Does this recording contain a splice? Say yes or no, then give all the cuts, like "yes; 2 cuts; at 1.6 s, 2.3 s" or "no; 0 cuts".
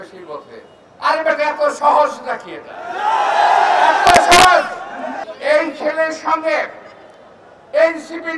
yes; 1 cut; at 5.2 s